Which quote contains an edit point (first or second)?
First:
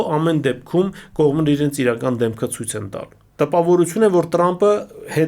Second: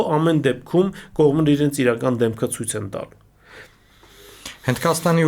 first